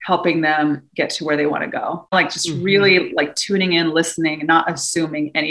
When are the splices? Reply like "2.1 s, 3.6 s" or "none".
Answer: 2.1 s